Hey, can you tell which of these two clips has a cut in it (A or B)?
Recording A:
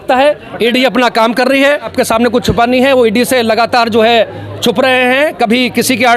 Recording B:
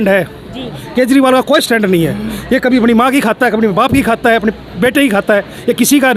A